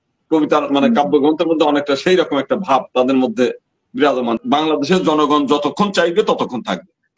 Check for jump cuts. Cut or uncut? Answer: cut